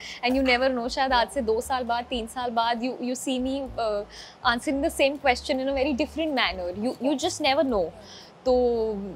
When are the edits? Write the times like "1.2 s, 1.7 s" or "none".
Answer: none